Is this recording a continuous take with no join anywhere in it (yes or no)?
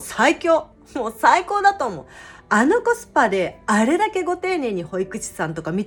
yes